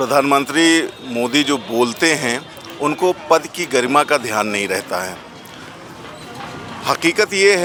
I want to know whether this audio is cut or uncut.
uncut